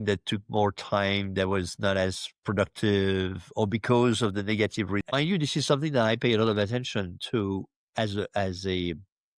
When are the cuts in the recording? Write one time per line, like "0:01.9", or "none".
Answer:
0:05.0

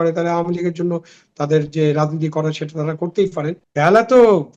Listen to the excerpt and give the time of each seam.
0:03.6

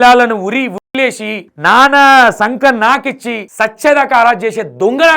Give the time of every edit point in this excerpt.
0:01.5
0:03.4

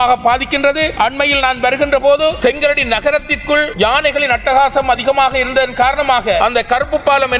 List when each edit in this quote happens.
0:00.9
0:02.4
0:03.7
0:06.4

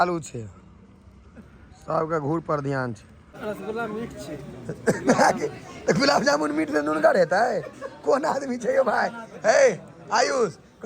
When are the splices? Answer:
0:03.3

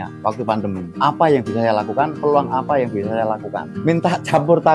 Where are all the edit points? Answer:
0:03.7

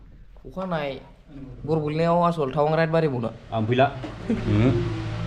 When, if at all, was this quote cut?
none

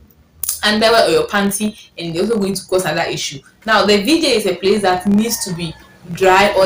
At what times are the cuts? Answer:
none

